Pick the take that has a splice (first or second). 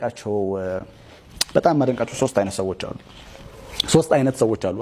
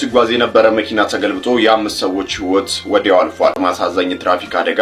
second